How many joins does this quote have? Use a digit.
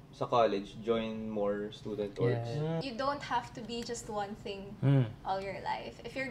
1